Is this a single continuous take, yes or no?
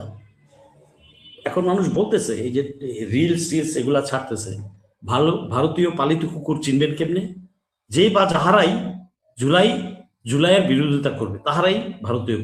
yes